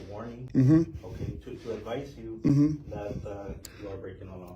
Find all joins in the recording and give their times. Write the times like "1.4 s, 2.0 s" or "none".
3.6 s